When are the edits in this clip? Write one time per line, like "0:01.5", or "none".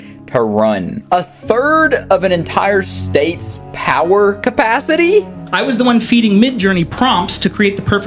0:05.4

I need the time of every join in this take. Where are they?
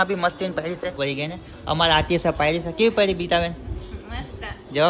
0:00.9

